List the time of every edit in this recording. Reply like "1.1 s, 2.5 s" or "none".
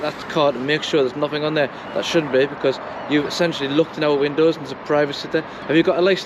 none